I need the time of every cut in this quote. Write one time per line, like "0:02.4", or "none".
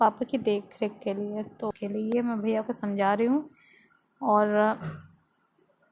0:01.7